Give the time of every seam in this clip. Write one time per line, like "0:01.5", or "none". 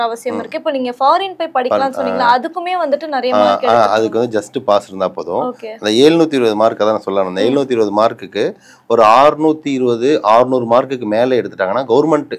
none